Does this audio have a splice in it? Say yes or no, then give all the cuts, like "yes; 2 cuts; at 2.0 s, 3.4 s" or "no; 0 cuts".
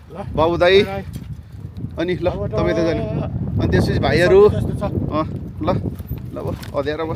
no; 0 cuts